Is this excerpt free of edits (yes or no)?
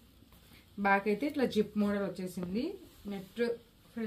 yes